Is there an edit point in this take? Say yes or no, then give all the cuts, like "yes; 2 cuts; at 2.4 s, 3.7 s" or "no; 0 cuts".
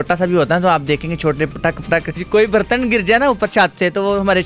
yes; 1 cut; at 2.1 s